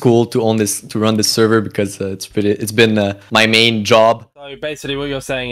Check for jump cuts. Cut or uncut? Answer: cut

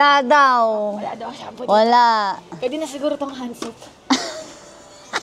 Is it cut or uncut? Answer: uncut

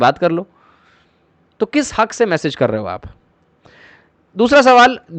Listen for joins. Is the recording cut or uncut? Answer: uncut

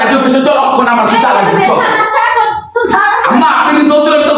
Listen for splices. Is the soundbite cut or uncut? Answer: uncut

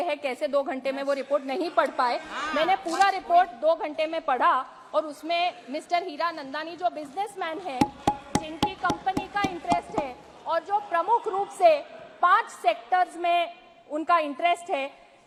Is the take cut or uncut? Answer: uncut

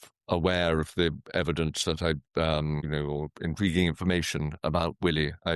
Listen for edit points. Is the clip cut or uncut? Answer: cut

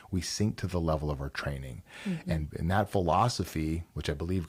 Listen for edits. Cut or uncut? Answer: uncut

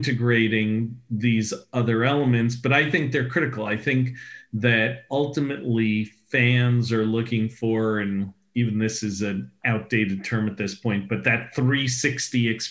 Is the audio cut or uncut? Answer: uncut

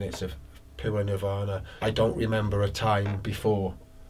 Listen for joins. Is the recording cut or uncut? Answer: cut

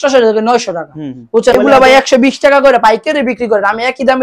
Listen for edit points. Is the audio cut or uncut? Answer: cut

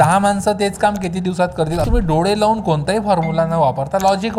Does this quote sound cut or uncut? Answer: cut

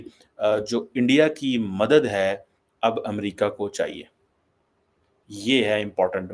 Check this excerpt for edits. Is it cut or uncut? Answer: uncut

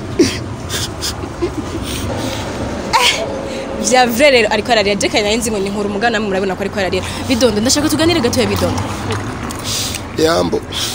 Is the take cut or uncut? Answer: cut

